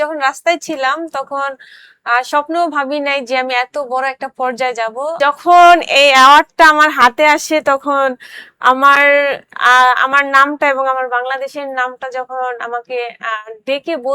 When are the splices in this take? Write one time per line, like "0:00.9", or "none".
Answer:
0:05.2